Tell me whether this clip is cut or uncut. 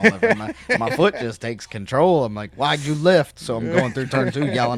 uncut